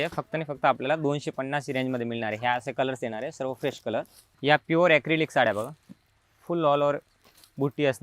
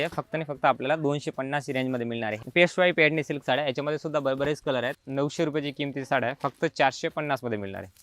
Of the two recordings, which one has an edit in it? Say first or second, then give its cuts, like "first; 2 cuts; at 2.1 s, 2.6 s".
second; 2 cuts; at 2.3 s, 5.0 s